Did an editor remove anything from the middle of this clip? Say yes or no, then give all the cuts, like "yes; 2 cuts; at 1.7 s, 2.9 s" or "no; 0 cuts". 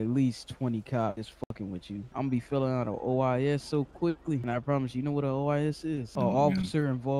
yes; 3 cuts; at 1.7 s, 4.4 s, 6.1 s